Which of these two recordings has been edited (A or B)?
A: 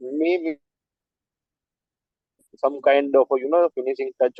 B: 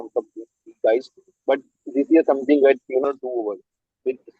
B